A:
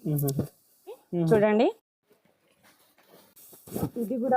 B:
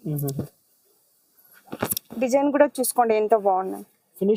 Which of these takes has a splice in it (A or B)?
A